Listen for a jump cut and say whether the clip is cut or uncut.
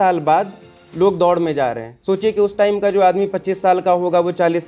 cut